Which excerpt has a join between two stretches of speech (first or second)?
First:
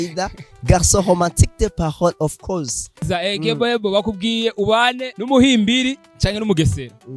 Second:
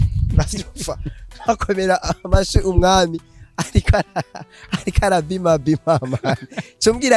first